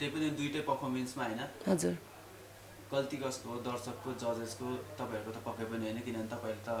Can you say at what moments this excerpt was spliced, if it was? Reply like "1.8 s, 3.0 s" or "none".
none